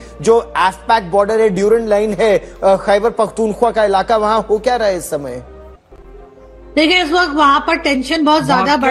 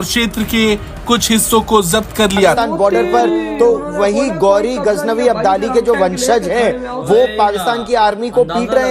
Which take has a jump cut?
second; 1 cut; at 2.6 s

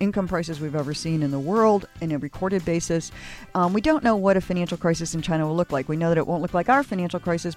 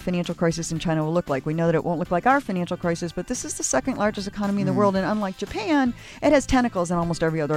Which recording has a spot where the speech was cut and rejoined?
first; 1 cut; at 3.5 s

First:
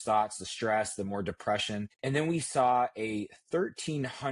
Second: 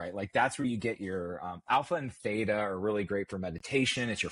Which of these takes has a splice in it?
first; 1 cut; at 1.9 s

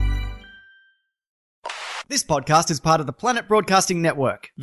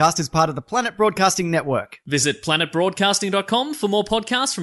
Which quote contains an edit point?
first; 1 cut; at 1.5 s

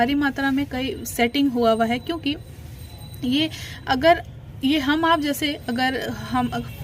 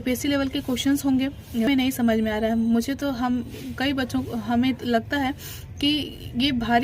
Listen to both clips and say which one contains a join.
second; 1 cut; at 1.7 s

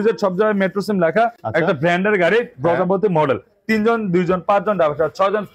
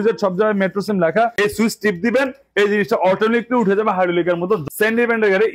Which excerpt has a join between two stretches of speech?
second; 2 cuts; at 1.4 s, 4.6 s

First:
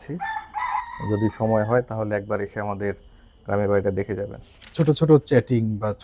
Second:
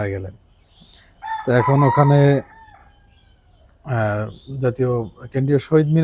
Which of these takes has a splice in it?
first; 1 cut; at 4.7 s

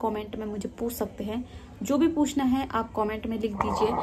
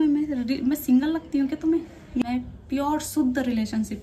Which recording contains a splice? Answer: second; 1 cut; at 2.2 s

